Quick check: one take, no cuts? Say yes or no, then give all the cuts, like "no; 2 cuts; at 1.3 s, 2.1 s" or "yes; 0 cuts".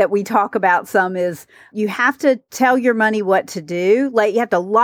no; 1 cut; at 1.7 s